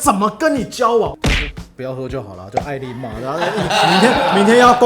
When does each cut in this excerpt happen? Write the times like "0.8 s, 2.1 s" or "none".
1.1 s